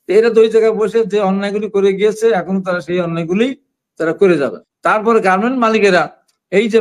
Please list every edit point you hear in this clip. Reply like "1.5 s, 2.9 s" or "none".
4.7 s